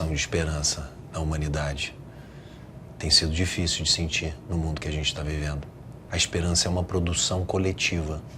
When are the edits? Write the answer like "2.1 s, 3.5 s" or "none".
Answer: 6.0 s